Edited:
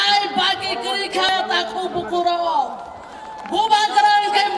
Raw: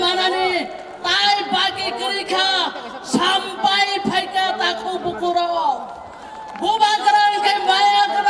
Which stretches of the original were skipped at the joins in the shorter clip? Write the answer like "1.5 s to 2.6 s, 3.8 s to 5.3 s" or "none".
2.4 s to 4.4 s